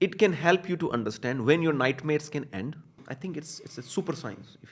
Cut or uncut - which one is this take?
cut